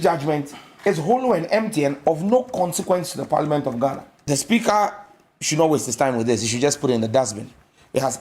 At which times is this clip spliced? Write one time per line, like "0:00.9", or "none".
0:04.2